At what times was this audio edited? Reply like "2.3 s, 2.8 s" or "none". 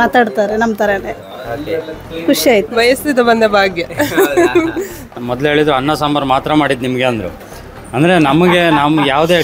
2.7 s, 5.2 s